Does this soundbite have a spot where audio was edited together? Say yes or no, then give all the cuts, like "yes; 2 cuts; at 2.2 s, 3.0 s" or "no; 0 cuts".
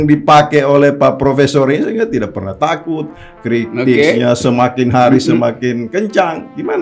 no; 0 cuts